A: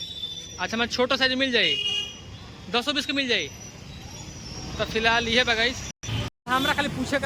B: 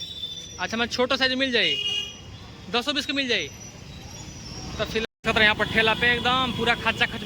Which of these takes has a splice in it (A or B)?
B